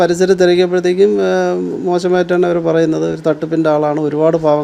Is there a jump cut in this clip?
no; 0 cuts

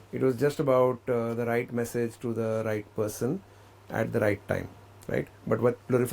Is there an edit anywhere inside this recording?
no; 0 cuts

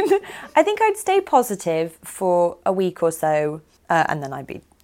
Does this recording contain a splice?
yes; 1 cut; at 3.7 s

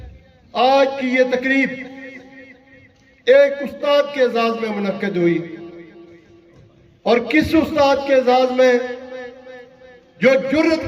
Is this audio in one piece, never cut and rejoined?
yes; 0 cuts

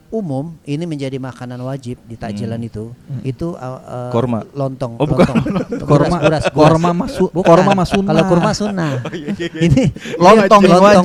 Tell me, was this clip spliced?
no; 0 cuts

